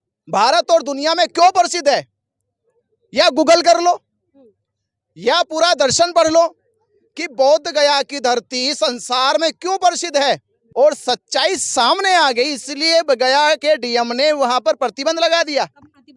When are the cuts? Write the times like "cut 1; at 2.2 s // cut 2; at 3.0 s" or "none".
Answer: cut 1; at 10.6 s